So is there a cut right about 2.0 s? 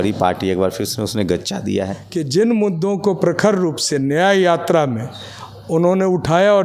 yes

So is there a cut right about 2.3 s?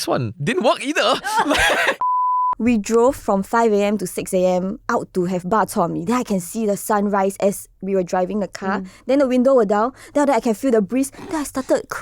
yes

